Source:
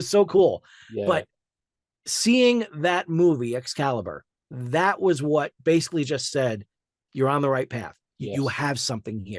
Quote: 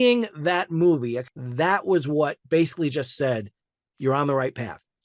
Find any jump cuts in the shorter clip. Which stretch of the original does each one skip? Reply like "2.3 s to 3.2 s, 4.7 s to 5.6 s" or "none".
3.7 s to 4.4 s